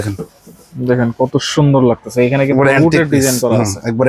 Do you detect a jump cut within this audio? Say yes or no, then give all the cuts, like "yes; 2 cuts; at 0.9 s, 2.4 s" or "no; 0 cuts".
no; 0 cuts